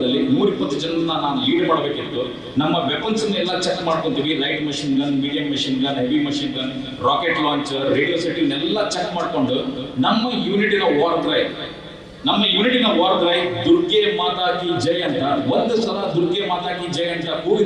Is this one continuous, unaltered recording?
yes; 0 cuts

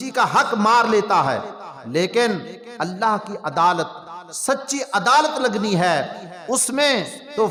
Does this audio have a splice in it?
no; 0 cuts

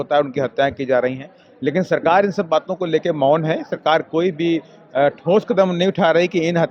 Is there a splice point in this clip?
no; 0 cuts

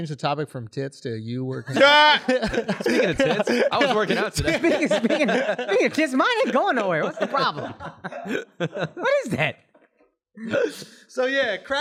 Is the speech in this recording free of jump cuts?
yes; 0 cuts

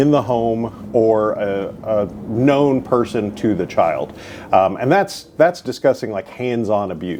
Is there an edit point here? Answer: no; 0 cuts

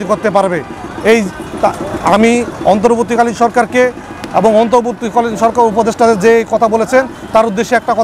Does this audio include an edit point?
no; 0 cuts

